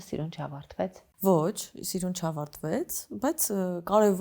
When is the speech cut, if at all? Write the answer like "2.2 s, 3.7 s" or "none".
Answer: 1.0 s